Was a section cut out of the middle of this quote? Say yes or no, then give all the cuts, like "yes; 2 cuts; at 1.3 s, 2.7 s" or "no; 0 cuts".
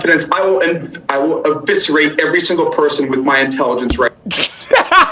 no; 0 cuts